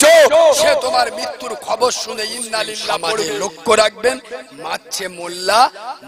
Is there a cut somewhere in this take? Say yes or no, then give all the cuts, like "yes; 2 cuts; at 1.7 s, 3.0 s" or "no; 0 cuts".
yes; 1 cut; at 3.2 s